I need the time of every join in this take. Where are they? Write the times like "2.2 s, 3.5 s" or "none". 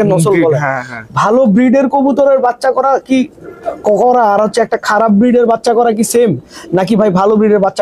none